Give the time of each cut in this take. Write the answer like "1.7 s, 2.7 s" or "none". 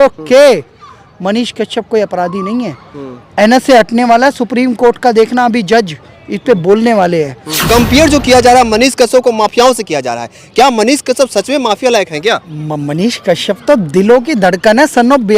7.5 s